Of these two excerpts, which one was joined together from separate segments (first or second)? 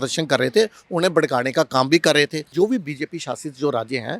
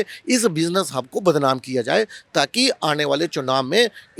first